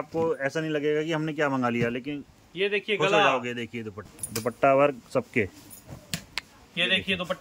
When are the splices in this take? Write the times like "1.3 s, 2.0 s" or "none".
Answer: none